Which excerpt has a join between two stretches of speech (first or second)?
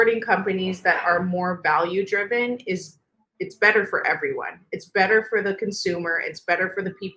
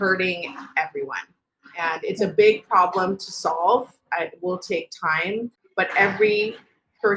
second